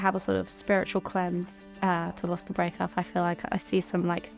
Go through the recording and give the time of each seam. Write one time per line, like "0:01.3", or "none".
none